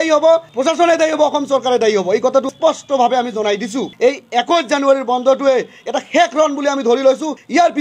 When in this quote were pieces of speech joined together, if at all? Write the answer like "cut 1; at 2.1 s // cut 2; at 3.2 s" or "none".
cut 1; at 2.5 s // cut 2; at 3.9 s

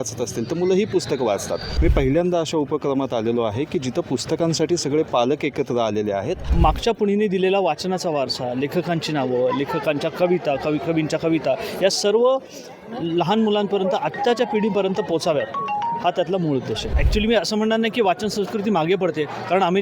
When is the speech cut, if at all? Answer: cut 1; at 1.7 s // cut 2; at 6.5 s // cut 3; at 17.0 s

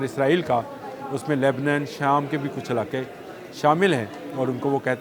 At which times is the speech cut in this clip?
none

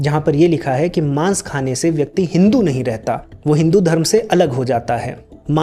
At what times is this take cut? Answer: none

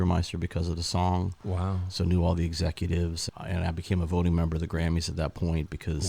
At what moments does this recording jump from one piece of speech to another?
cut 1; at 3.2 s

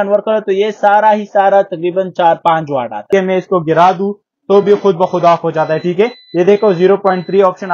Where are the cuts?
cut 1; at 3.0 s

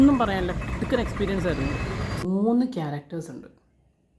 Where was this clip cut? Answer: cut 1; at 2.2 s

